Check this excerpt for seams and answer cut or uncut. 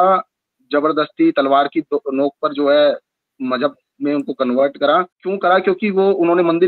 cut